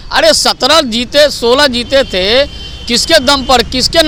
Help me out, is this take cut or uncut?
uncut